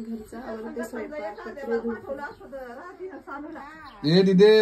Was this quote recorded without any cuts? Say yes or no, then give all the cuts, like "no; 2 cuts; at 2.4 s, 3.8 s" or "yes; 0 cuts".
yes; 0 cuts